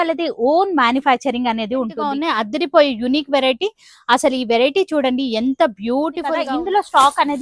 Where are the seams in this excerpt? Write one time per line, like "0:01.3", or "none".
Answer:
0:02.2
0:06.4